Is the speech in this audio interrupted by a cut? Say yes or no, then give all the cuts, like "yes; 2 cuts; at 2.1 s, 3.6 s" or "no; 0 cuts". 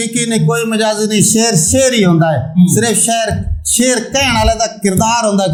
no; 0 cuts